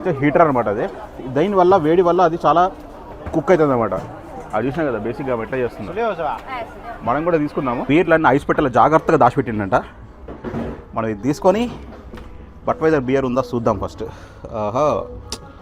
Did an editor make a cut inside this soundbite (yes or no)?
yes